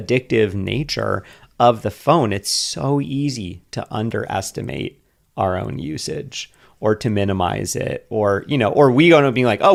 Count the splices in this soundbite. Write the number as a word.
zero